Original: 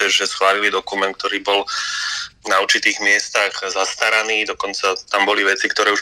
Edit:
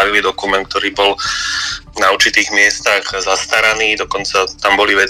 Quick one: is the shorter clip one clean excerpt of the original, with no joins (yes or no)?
yes